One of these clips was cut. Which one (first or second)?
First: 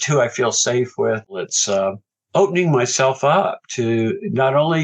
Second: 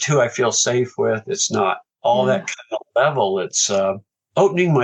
first